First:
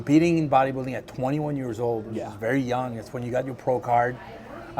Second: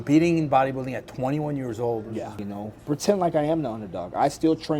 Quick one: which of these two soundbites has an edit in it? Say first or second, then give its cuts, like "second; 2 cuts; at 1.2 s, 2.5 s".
second; 1 cut; at 2.3 s